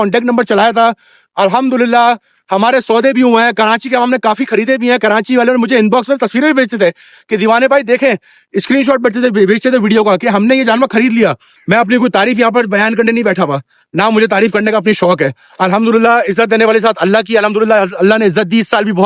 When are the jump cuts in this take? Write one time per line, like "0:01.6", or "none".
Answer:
0:11.5